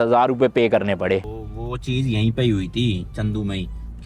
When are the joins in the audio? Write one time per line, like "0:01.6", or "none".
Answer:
0:01.2

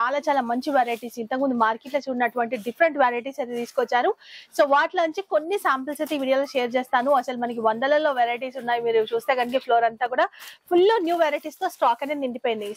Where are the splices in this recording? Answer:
none

